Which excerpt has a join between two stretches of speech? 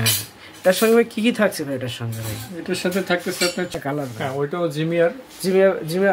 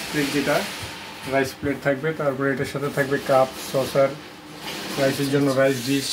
first; 1 cut; at 3.7 s

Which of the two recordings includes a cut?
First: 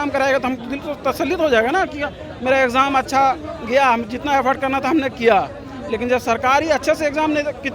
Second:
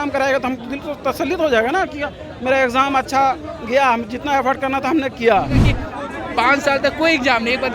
second; 1 cut; at 5.7 s

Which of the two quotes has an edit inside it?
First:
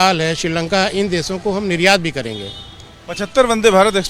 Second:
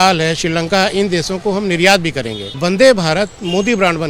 second; 1 cut; at 2.4 s

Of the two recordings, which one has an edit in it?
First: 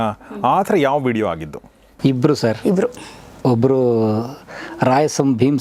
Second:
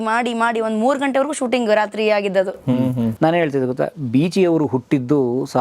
second; 1 cut; at 3.1 s

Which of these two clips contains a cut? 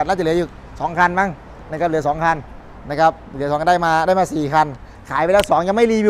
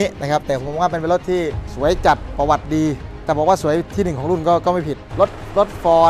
second; 3 cuts; at 1.6 s, 3.1 s, 5.0 s

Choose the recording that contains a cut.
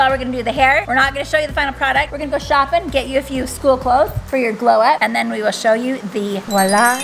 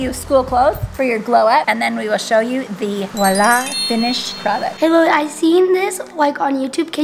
second; 1 cut; at 4.7 s

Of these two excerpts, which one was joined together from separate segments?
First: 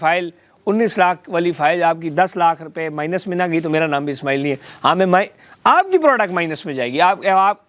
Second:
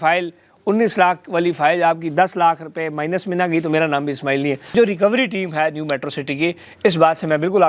second; 1 cut; at 4.7 s

